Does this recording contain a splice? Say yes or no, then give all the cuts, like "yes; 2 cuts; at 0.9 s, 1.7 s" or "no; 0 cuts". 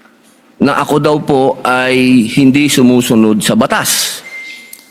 no; 0 cuts